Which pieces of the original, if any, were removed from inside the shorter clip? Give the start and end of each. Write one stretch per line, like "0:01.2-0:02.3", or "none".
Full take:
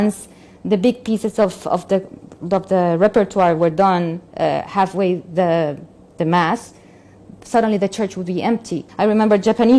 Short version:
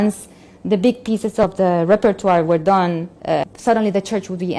0:01.4-0:02.6
0:04.6-0:07.4

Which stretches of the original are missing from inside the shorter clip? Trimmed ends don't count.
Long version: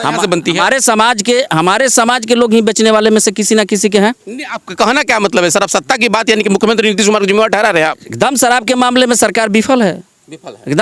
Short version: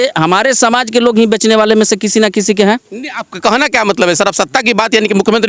none

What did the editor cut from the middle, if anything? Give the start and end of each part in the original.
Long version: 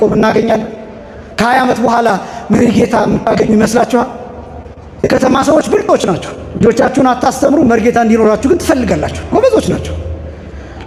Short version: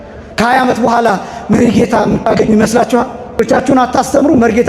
0:04.4-0:06.7

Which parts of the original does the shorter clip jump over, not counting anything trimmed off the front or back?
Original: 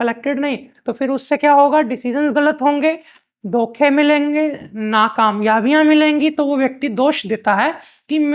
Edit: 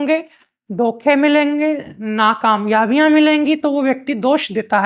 none

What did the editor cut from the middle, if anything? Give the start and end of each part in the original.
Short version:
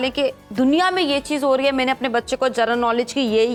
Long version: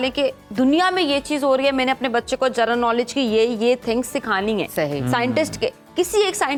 none

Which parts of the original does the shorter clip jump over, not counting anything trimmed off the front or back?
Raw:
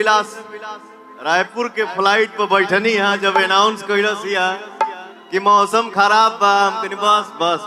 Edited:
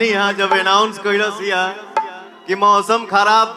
none

